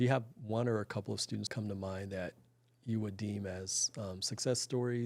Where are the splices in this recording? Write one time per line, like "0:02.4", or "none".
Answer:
0:01.5